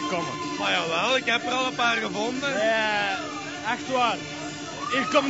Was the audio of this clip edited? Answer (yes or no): no